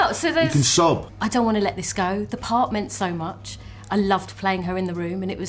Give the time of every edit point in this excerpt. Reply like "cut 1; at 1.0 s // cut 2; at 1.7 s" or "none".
cut 1; at 1.1 s